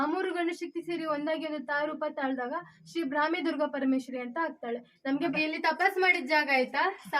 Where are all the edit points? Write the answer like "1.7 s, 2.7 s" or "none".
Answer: 5.3 s